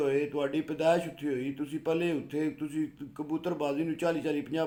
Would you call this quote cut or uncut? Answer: uncut